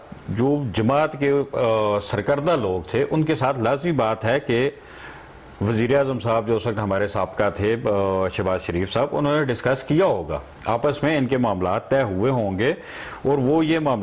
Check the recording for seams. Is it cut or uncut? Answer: uncut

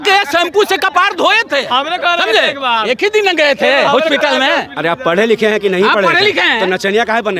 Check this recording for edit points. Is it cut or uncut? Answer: uncut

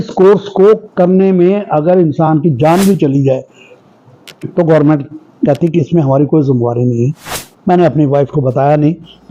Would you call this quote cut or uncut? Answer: cut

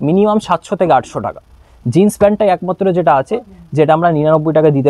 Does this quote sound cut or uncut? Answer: uncut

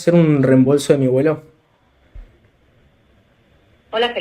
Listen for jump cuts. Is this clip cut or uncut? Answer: uncut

